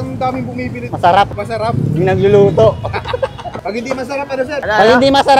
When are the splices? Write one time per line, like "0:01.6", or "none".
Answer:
0:00.9
0:01.4
0:03.5
0:04.6